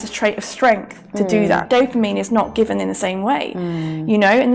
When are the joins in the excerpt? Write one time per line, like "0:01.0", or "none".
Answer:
0:01.6